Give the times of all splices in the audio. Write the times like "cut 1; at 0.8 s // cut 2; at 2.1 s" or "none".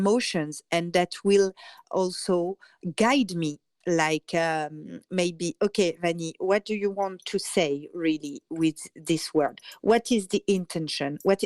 cut 1; at 1.8 s // cut 2; at 2.8 s // cut 3; at 3.7 s